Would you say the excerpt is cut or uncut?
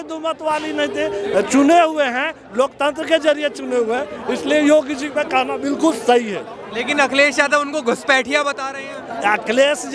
uncut